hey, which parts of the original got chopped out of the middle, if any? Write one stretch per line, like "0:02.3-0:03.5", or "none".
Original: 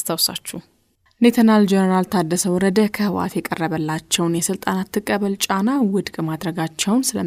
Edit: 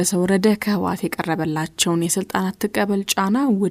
none